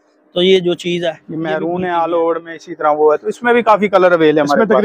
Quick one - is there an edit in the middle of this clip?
yes; 1 cut; at 1.3 s

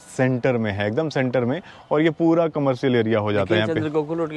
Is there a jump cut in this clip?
no; 0 cuts

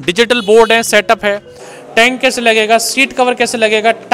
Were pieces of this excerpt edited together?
yes; 1 cut; at 1.5 s

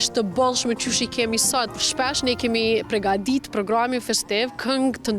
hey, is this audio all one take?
no; 1 cut; at 1.7 s

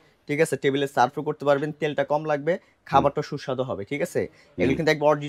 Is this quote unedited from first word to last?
yes; 0 cuts

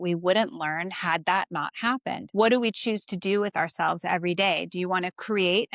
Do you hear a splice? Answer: yes; 1 cut; at 2.2 s

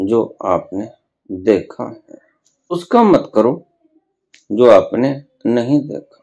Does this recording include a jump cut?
yes; 1 cut; at 2.7 s

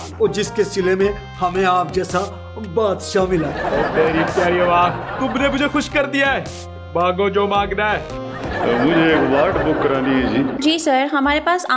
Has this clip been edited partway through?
yes; 1 cut; at 8.6 s

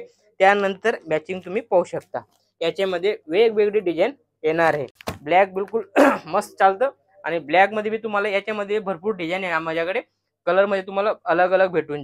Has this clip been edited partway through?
no; 0 cuts

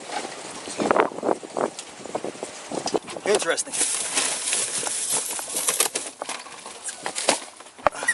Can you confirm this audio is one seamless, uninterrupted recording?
no; 1 cut; at 3.0 s

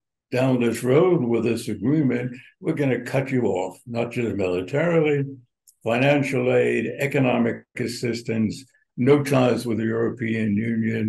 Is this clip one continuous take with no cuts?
yes; 0 cuts

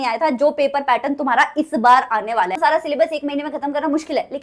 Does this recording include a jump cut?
yes; 1 cut; at 2.6 s

